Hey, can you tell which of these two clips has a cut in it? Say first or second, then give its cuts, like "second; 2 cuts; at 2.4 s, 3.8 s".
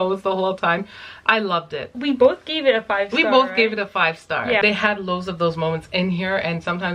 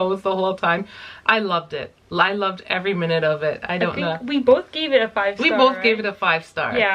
first; 2 cuts; at 1.9 s, 4.6 s